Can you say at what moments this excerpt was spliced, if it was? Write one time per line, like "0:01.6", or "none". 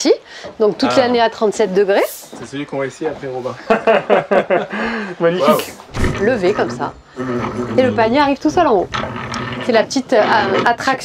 0:06.0